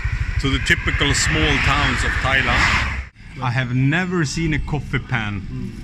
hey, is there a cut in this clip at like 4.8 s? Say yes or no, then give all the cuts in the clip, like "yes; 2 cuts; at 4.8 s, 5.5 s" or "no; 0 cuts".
no; 1 cut; at 3.2 s